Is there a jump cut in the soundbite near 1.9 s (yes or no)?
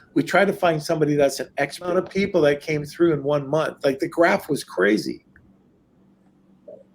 yes